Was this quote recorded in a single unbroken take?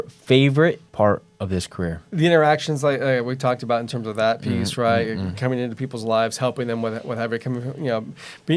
no; 2 cuts; at 0.8 s, 2.0 s

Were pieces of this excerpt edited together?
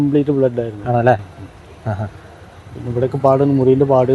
no; 0 cuts

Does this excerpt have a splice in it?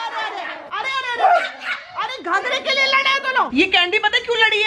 yes; 1 cut; at 3.5 s

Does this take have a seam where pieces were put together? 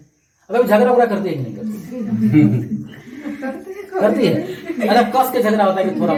no; 0 cuts

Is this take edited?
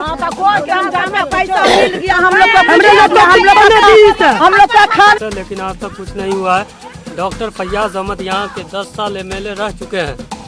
yes; 1 cut; at 5.2 s

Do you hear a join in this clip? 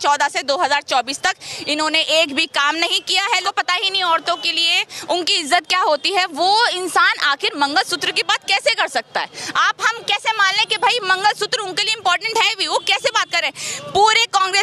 yes; 1 cut; at 3.4 s

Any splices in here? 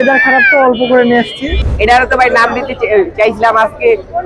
yes; 1 cut; at 1.6 s

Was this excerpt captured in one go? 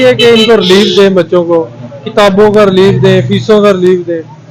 yes; 0 cuts

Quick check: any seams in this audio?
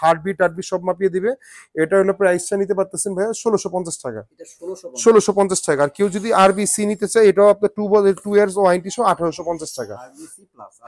no; 0 cuts

